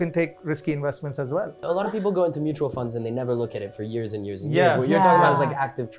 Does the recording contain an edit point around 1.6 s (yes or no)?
yes